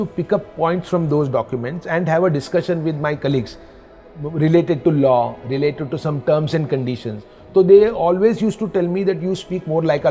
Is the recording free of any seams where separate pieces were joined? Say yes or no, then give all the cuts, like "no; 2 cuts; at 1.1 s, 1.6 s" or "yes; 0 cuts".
yes; 0 cuts